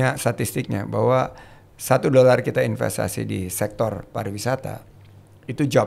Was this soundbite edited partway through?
no; 0 cuts

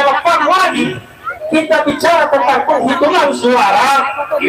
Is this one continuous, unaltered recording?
yes; 0 cuts

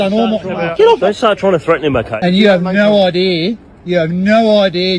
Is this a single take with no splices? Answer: no; 2 cuts; at 1.0 s, 2.1 s

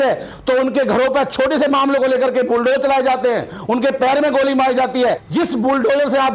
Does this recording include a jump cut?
yes; 1 cut; at 5.2 s

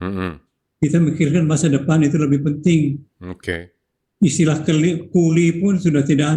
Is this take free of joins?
yes; 0 cuts

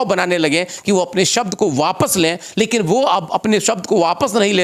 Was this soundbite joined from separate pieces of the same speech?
no; 0 cuts

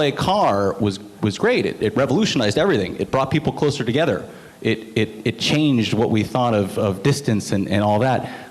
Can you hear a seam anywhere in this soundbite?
no; 0 cuts

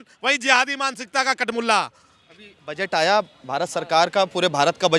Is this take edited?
no; 0 cuts

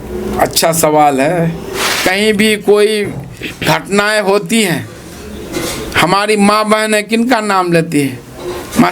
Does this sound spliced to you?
yes; 1 cut; at 1.9 s

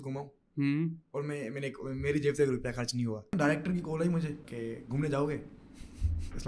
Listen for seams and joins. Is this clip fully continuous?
no; 2 cuts; at 3.3 s, 4.5 s

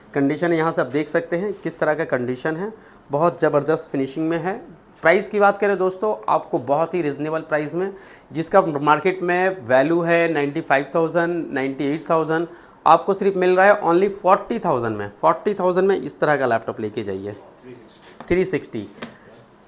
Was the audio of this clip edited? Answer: no; 0 cuts

